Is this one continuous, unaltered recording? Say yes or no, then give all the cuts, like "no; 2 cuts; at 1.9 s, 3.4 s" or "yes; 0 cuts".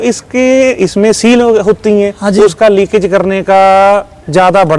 yes; 0 cuts